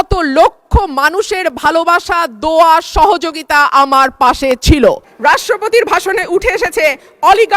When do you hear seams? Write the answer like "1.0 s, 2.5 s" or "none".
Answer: 5.1 s